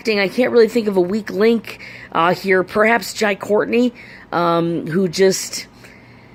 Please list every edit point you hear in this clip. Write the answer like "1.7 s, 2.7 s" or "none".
none